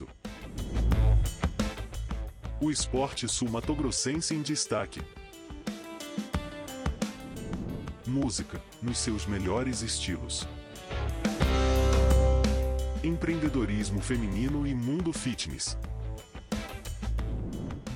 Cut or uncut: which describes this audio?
uncut